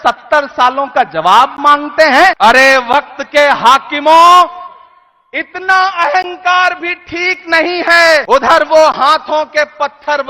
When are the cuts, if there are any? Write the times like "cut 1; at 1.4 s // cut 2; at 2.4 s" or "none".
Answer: cut 1; at 2.4 s // cut 2; at 8.2 s